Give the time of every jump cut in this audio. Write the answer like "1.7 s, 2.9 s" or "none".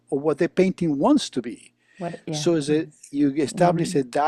none